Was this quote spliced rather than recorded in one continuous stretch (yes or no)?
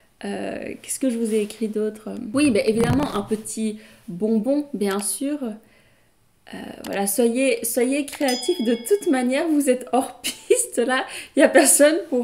yes